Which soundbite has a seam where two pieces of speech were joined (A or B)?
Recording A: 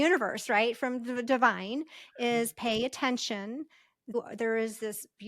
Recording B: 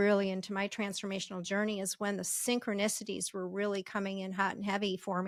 A